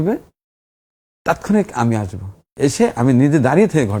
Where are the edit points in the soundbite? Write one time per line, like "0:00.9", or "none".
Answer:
none